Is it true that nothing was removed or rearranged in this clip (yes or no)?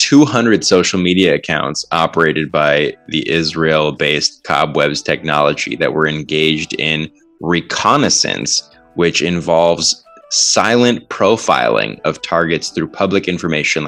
yes